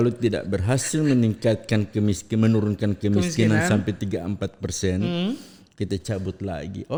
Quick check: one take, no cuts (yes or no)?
yes